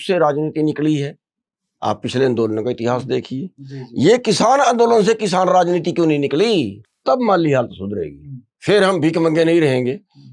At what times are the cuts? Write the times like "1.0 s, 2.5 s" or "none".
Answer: 6.8 s

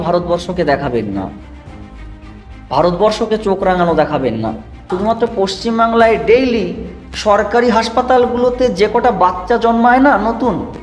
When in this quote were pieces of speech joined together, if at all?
4.9 s

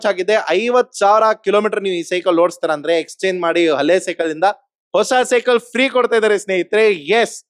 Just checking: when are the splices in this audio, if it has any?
none

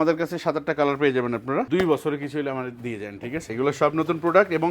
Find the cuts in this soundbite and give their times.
1.7 s, 3.4 s

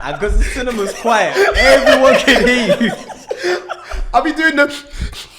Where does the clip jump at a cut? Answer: none

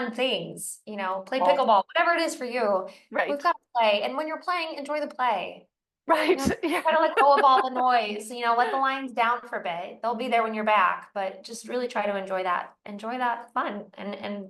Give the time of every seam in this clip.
none

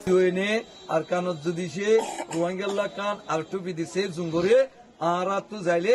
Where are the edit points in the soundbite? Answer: none

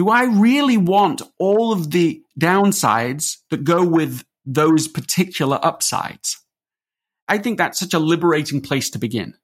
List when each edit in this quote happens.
7.2 s

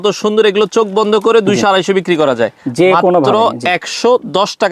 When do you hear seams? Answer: none

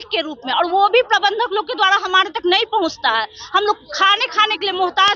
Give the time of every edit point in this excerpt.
none

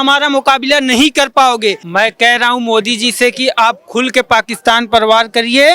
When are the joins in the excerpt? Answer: 1.8 s

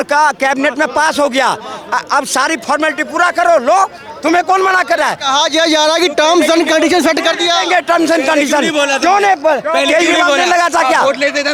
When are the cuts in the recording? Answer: none

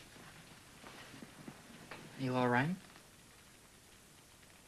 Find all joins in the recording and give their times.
none

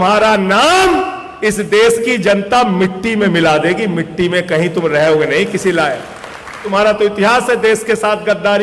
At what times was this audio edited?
6.6 s

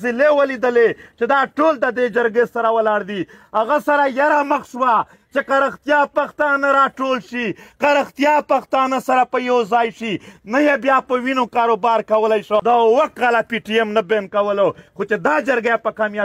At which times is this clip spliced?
12.6 s

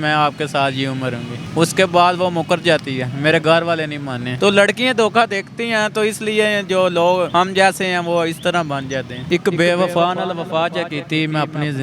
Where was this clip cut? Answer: 1.4 s, 4.2 s, 7.3 s, 9.2 s

